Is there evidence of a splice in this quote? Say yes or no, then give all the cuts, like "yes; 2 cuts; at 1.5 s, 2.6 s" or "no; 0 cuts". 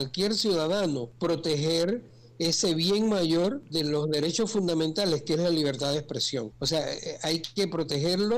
yes; 3 cuts; at 1.1 s, 3.6 s, 6.6 s